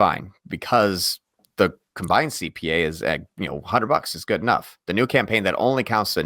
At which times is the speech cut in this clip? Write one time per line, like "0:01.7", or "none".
none